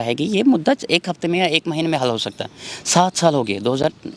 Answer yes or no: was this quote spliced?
no